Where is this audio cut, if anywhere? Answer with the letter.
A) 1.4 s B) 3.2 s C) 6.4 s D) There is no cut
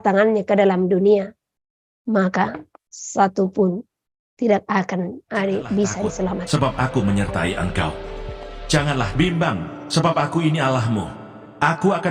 C